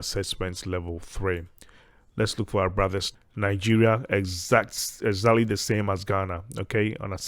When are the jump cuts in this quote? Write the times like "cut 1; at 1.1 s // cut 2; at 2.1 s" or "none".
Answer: cut 1; at 3.1 s